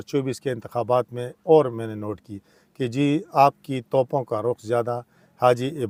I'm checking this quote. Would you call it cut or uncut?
uncut